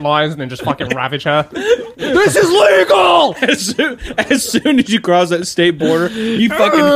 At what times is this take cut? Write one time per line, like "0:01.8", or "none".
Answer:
0:02.1

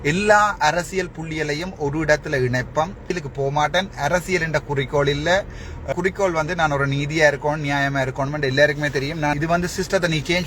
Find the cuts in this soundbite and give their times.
0:03.1
0:05.9
0:09.4

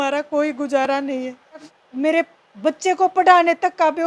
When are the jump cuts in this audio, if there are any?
0:01.8

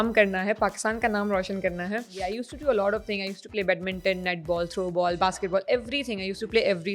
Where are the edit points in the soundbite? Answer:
0:02.2

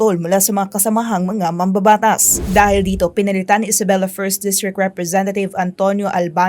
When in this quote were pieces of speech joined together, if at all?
0:02.4

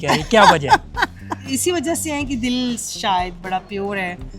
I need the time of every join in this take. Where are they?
0:01.4

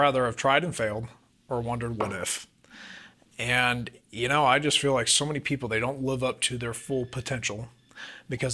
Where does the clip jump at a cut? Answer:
none

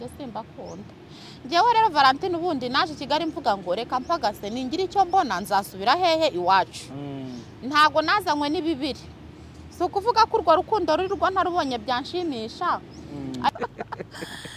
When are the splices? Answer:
0:13.5

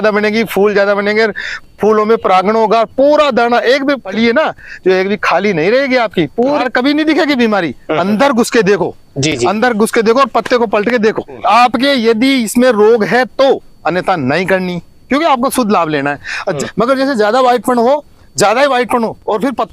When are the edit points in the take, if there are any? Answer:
0:04.1
0:06.6
0:11.3
0:16.6

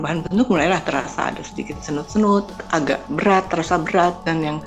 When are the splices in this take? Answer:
0:02.6

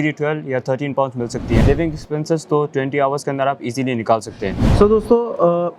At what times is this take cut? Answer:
0:01.6
0:04.6

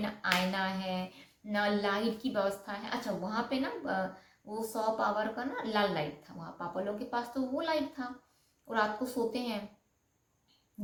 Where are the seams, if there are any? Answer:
none

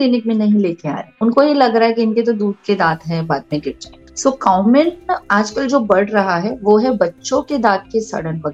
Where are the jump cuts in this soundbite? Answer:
none

